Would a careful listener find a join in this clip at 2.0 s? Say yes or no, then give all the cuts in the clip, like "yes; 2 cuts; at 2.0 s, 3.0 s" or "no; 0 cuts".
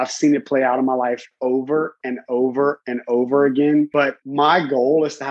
no; 1 cut; at 4.2 s